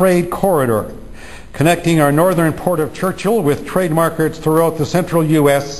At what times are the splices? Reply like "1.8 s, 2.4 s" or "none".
1.0 s